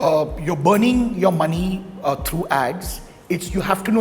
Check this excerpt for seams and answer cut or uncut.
uncut